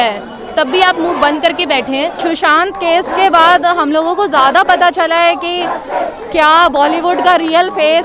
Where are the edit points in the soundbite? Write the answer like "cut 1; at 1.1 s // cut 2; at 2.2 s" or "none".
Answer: cut 1; at 2.2 s